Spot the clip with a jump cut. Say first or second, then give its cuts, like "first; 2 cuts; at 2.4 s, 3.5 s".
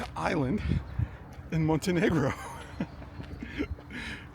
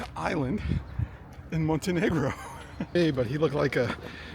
second; 1 cut; at 2.9 s